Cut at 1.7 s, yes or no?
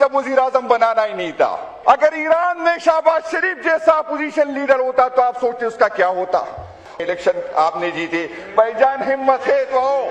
yes